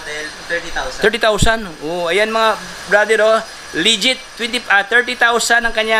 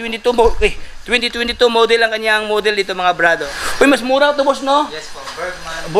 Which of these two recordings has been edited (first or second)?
second